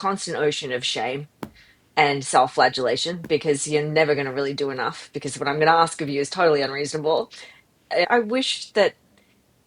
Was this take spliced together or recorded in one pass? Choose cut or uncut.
cut